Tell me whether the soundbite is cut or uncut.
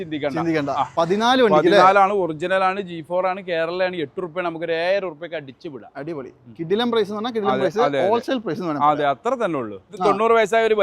cut